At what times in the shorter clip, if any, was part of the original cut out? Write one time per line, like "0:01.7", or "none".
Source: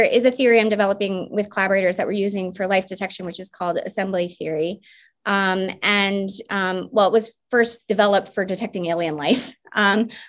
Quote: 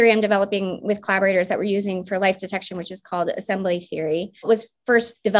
0:04.5